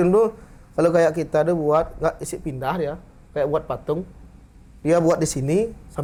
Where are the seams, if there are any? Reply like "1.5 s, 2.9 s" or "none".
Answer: none